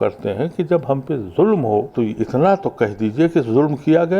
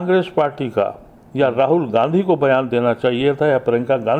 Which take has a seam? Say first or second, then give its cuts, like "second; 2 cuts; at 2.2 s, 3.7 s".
first; 1 cut; at 1.9 s